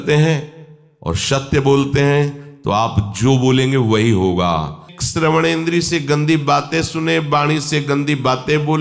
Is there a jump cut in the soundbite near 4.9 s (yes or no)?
yes